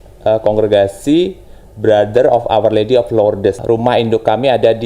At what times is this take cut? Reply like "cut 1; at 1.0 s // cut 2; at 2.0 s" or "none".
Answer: cut 1; at 3.6 s